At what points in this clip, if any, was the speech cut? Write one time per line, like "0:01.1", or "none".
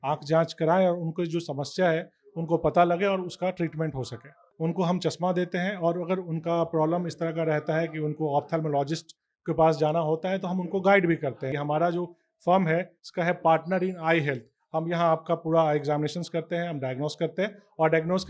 0:04.5
0:11.5